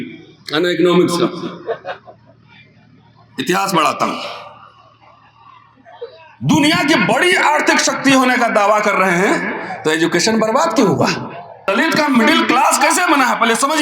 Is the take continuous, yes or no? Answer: no